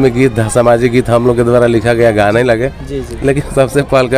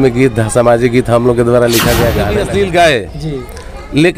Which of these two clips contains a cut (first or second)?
second